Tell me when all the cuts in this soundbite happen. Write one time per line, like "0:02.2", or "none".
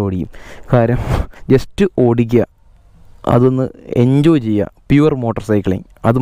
0:01.3